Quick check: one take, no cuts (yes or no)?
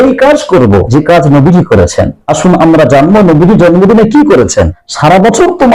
no